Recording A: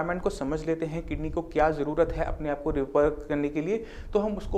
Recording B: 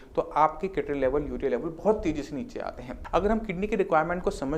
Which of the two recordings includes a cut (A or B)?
B